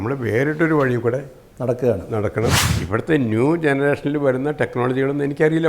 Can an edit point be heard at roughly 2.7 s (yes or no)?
yes